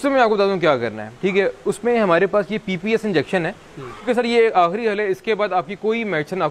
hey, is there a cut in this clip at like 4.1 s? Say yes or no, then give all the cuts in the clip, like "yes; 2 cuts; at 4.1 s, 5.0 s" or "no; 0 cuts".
yes; 1 cut; at 4.1 s